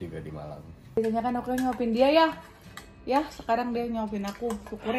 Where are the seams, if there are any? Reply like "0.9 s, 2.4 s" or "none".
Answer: 1.0 s